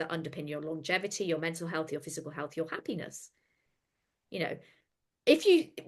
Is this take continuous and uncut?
yes; 0 cuts

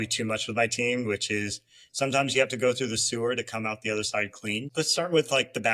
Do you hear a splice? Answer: yes; 1 cut; at 4.7 s

